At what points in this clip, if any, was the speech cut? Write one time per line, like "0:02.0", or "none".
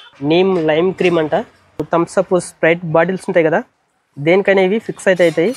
0:01.8